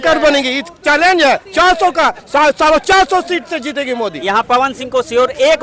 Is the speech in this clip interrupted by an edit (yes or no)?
yes